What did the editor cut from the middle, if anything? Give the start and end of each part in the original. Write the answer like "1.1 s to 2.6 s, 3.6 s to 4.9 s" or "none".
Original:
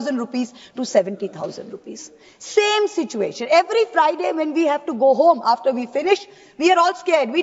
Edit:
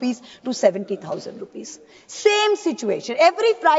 none